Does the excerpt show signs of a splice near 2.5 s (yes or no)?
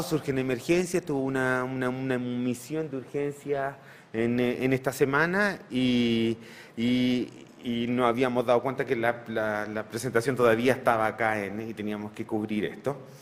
no